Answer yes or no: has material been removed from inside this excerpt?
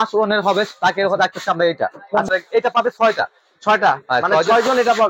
yes